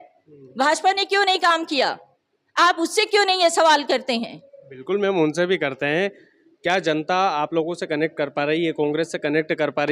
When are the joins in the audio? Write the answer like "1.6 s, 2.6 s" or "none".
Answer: 6.3 s